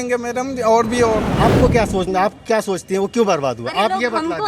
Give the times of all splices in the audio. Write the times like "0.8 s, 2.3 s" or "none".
1.3 s